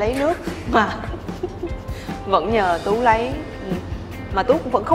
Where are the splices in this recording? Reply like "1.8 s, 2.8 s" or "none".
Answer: none